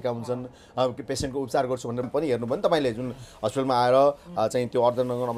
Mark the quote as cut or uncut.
cut